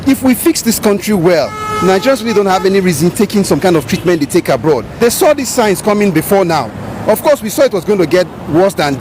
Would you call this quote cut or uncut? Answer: cut